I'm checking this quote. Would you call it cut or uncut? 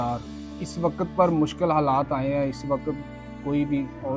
uncut